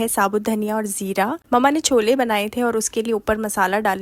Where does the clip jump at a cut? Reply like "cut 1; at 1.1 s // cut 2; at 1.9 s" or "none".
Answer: none